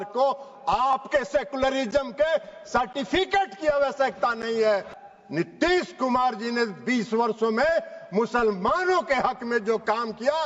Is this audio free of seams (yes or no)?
no